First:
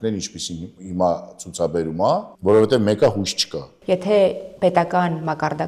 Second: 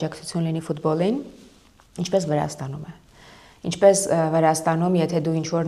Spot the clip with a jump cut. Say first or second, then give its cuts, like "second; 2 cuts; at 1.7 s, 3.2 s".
first; 2 cuts; at 2.3 s, 3.7 s